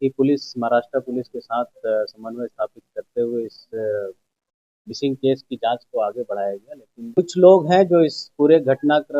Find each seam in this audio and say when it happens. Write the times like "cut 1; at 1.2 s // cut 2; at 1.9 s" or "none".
cut 1; at 7.2 s